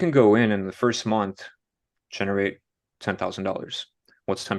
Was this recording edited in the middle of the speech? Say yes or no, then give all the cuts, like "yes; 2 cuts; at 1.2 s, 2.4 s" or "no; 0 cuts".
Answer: no; 0 cuts